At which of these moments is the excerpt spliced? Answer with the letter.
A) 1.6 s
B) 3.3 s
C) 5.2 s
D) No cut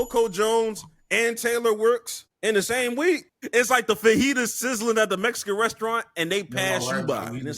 B